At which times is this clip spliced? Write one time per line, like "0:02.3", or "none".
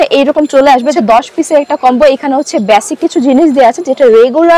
0:00.9